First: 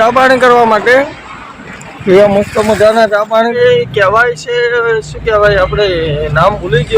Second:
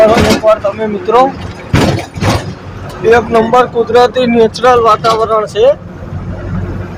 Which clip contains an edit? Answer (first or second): first